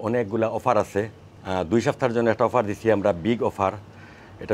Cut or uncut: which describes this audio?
uncut